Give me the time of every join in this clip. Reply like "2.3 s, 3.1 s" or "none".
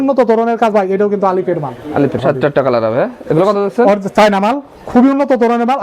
2.2 s